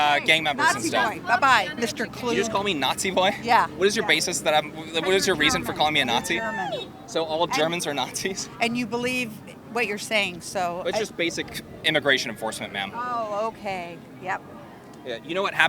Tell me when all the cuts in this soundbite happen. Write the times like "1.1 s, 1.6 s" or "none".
none